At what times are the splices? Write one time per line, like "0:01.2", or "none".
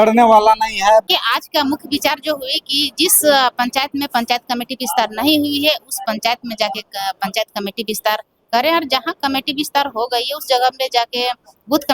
0:01.0